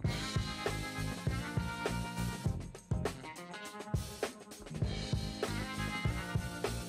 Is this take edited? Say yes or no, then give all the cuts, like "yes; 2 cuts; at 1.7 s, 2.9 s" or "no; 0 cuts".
no; 0 cuts